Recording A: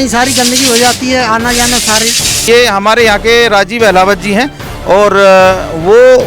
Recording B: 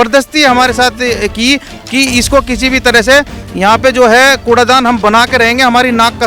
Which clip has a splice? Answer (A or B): A